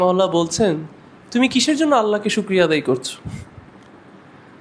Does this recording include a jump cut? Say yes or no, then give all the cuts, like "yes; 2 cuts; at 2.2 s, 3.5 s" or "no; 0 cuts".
no; 0 cuts